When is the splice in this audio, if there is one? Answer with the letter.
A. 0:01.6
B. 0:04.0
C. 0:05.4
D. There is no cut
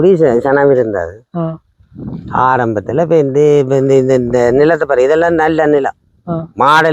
D